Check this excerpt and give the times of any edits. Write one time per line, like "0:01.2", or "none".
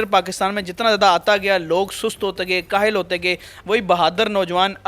0:03.5